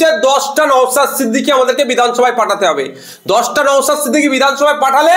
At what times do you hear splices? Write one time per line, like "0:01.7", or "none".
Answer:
none